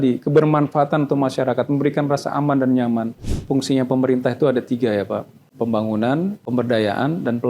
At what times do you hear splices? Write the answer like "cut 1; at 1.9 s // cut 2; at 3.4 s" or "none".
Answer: cut 1; at 3.4 s // cut 2; at 5.4 s // cut 3; at 6.4 s